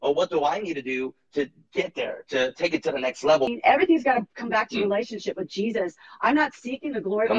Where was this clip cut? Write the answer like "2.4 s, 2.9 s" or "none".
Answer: 3.5 s